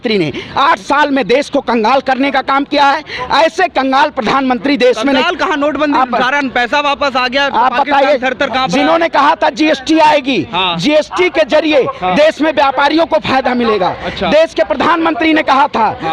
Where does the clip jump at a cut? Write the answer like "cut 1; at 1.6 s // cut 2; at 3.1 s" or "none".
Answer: none